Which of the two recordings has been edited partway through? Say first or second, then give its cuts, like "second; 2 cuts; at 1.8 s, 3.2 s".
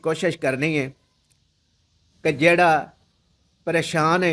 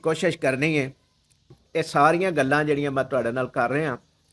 second; 1 cut; at 1.6 s